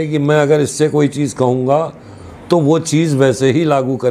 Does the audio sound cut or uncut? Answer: uncut